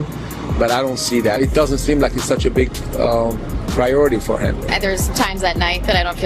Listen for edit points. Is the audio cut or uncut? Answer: uncut